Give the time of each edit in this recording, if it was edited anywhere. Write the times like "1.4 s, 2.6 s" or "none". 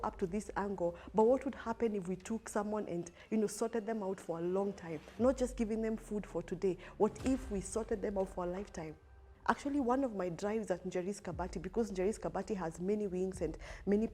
9.3 s